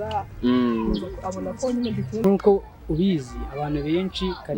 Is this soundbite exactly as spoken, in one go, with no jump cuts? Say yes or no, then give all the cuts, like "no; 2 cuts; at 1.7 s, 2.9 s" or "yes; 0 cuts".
no; 1 cut; at 2.2 s